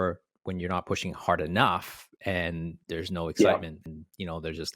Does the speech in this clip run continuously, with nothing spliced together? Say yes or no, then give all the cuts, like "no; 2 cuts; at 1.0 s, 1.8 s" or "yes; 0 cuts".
no; 1 cut; at 3.8 s